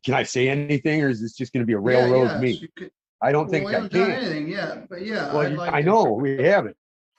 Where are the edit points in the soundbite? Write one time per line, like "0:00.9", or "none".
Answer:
none